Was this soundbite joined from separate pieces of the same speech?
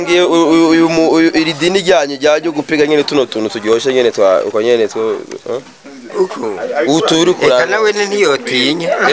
no; 0 cuts

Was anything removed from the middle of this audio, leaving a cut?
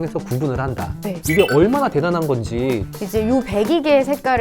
yes; 2 cuts; at 1.2 s, 2.9 s

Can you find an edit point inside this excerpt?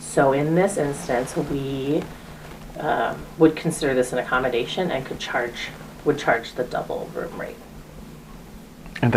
no; 0 cuts

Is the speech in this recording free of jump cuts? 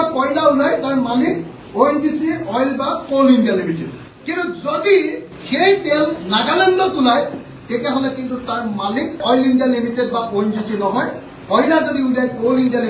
yes; 0 cuts

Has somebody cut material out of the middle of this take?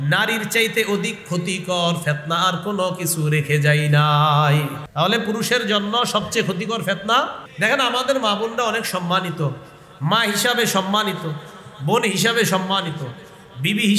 yes; 2 cuts; at 4.8 s, 7.4 s

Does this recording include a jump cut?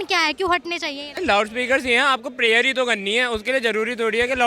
yes; 1 cut; at 1.1 s

